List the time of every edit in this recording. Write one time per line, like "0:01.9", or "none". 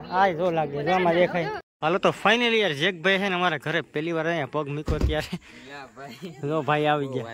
0:01.6